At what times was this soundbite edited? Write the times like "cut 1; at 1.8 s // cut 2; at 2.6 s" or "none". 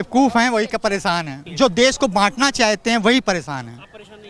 cut 1; at 1.4 s